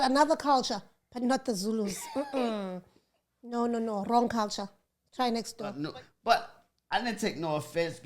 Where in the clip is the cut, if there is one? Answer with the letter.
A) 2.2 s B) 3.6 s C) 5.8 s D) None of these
C